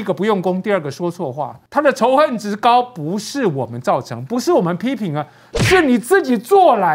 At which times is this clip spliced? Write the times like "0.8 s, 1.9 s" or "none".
1.6 s

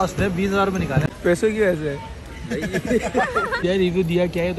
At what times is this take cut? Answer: 1.1 s, 3.5 s

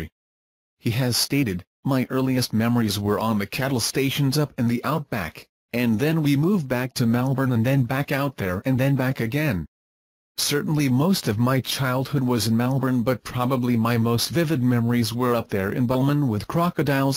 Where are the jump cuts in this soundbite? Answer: 13.3 s

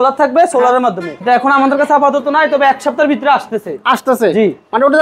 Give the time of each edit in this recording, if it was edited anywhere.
none

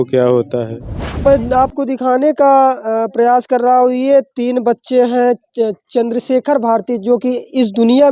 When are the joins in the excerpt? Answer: 1.3 s

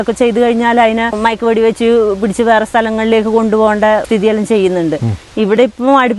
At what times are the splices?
1.2 s, 4.0 s, 5.3 s

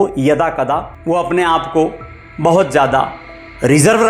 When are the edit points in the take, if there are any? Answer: 0.9 s

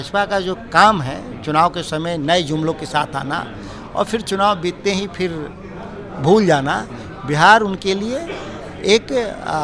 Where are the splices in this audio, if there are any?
none

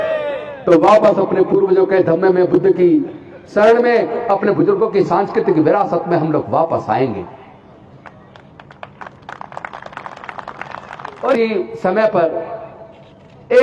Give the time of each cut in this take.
11.4 s

